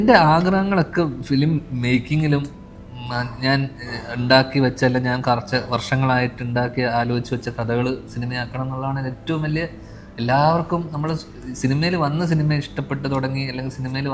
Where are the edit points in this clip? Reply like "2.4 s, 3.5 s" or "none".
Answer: none